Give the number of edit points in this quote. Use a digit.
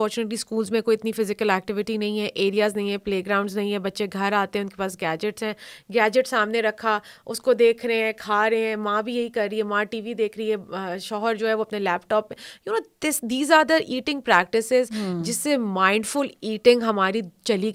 0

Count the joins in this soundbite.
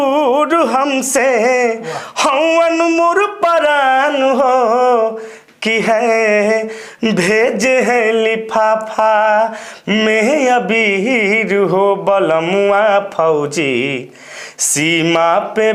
0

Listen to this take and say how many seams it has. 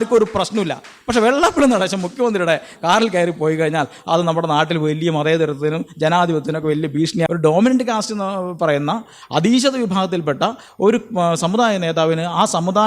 1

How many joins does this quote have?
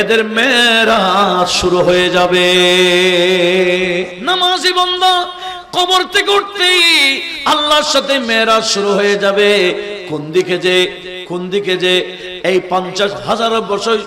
1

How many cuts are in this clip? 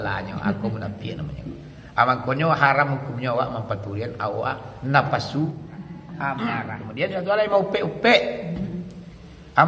1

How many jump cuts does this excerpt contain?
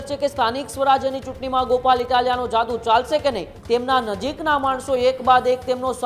1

